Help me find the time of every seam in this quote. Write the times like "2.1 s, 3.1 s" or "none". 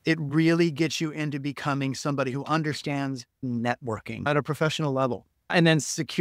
3.3 s, 4.3 s, 5.5 s